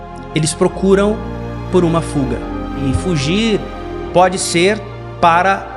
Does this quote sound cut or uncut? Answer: cut